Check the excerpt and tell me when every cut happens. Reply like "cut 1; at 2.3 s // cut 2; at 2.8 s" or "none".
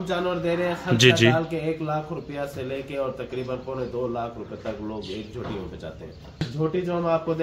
cut 1; at 6.5 s